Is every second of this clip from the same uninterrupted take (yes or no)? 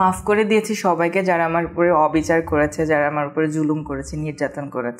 yes